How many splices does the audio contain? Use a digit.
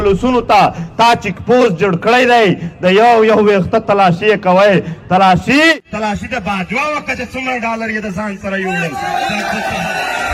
0